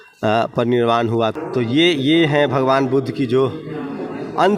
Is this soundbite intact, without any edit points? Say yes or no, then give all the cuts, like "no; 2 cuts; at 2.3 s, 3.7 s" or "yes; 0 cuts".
no; 1 cut; at 1.3 s